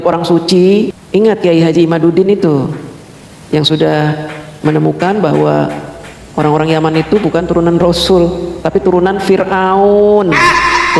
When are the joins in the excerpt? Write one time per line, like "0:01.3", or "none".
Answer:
0:01.0